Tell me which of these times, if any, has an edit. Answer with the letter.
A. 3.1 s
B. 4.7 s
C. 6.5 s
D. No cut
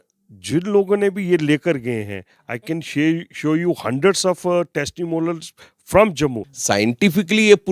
C